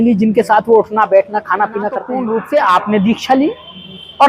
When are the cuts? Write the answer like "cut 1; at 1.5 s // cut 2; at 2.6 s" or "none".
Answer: cut 1; at 2.1 s